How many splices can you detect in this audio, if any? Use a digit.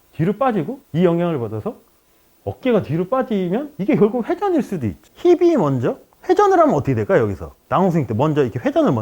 1